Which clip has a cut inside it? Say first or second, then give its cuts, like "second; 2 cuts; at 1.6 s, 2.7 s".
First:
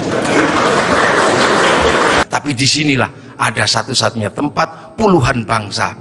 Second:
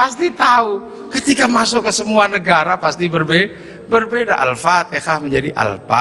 first; 1 cut; at 2.2 s